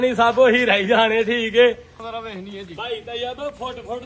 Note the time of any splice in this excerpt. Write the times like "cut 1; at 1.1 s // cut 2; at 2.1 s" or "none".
cut 1; at 2.0 s